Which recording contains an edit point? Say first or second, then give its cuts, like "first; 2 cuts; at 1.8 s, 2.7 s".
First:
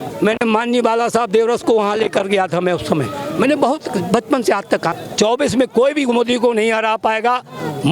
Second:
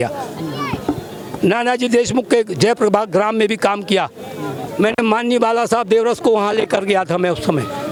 first; 1 cut; at 5.0 s